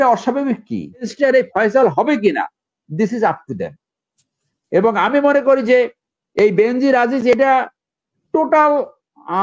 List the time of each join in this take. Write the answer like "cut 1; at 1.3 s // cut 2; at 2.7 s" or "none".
cut 1; at 1.1 s